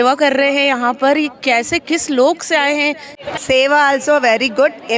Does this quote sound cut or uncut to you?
cut